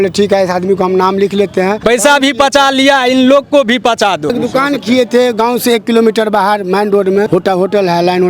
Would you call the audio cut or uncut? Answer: cut